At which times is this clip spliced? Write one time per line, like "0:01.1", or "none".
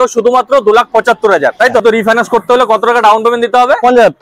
0:01.8